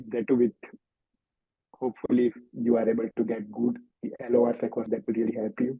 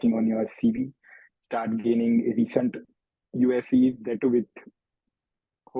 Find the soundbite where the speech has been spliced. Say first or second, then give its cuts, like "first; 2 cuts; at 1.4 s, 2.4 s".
first; 1 cut; at 4.9 s